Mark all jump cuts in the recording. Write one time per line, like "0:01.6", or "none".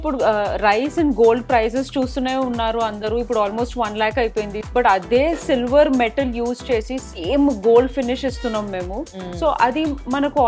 0:04.6